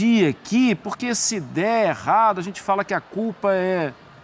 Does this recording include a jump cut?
no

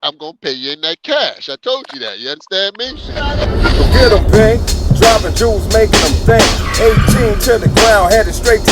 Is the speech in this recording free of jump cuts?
no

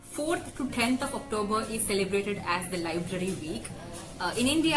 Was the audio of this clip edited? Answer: no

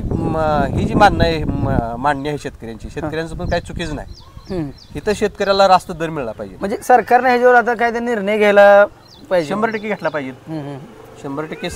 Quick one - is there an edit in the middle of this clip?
no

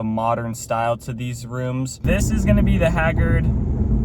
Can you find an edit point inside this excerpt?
yes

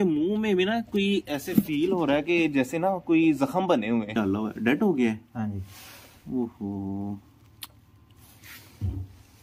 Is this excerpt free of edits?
no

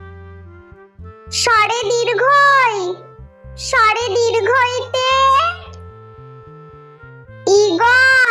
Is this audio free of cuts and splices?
no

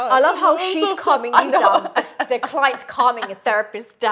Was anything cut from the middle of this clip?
no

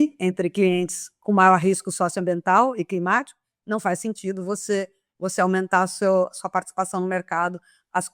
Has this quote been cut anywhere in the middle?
no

